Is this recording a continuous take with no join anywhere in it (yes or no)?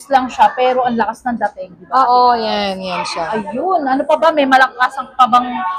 yes